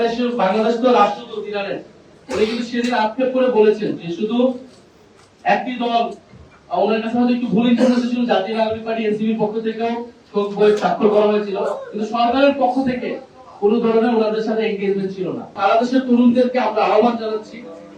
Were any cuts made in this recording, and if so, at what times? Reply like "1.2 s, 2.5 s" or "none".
15.5 s